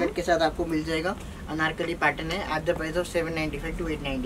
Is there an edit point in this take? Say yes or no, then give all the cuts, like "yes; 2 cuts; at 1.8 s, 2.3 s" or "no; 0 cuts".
no; 0 cuts